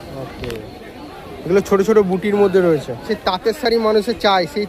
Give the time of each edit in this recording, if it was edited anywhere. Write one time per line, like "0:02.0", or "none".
0:03.0